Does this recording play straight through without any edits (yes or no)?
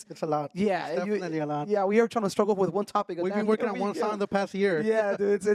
yes